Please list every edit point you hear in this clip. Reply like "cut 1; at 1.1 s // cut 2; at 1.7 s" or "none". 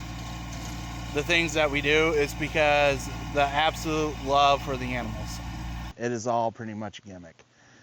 cut 1; at 5.9 s